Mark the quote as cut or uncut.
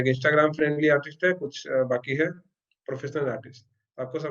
uncut